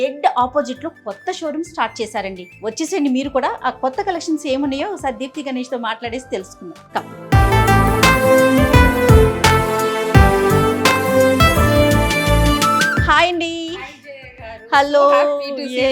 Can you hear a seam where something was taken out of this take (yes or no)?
yes